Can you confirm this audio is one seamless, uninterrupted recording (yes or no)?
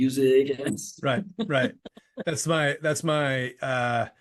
yes